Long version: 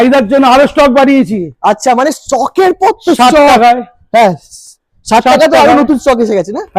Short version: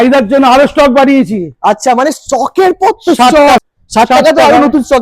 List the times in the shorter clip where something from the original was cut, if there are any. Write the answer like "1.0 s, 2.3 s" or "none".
3.6 s